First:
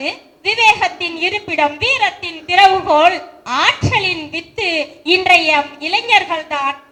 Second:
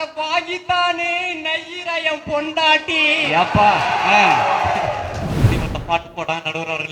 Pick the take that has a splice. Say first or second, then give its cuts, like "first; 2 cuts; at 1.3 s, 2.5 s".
second; 1 cut; at 5.3 s